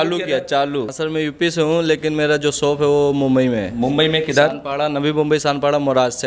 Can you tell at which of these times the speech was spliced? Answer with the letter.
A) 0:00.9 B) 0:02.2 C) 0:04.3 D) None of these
A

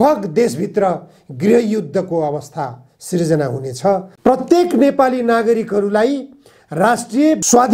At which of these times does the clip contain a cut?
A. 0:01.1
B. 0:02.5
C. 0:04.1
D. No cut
C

